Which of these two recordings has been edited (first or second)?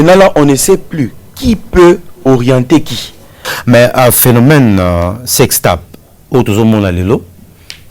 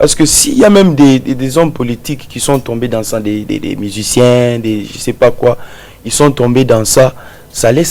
first